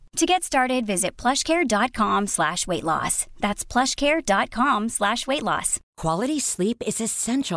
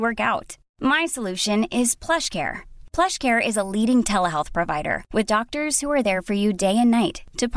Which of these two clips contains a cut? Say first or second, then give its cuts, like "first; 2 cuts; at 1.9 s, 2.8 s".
first; 1 cut; at 5.8 s